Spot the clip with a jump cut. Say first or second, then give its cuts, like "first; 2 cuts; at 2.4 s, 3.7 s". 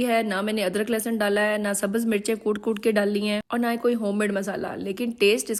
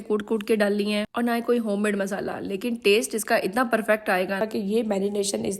second; 1 cut; at 4.4 s